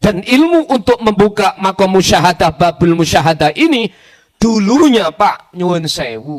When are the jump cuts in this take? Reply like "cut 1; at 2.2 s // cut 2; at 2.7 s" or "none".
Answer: none